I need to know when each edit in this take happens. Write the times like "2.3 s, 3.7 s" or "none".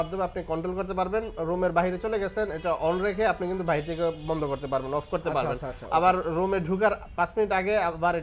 none

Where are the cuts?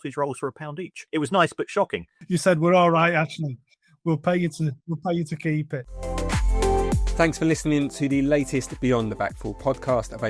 1.0 s, 2.1 s, 5.9 s

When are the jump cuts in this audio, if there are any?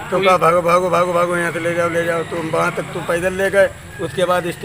2.7 s

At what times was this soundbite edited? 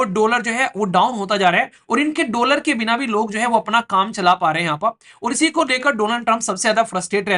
none

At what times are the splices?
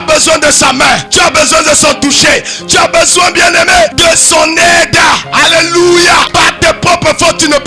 1.1 s, 4.0 s, 6.3 s

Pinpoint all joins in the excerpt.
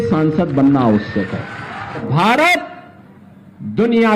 2.0 s

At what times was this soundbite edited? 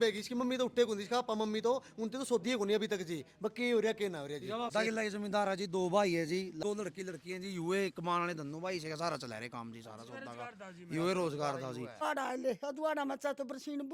4.7 s, 6.5 s, 12.0 s

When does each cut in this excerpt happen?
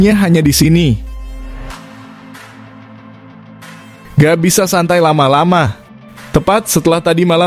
1.4 s, 4.1 s

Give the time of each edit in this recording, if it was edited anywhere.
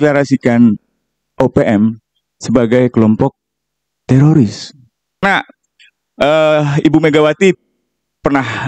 5.2 s

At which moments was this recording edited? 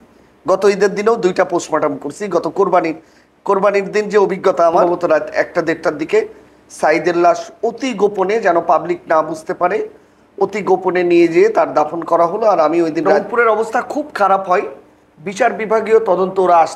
4.9 s, 13.2 s

